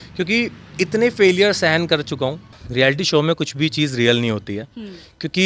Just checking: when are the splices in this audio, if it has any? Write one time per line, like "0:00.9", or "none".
0:02.6